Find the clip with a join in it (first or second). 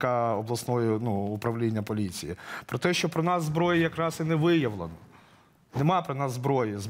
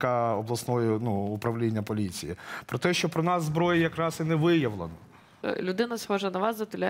second